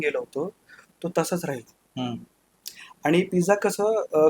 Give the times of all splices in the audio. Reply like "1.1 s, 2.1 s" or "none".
none